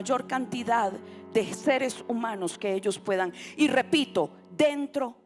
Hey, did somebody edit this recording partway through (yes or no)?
no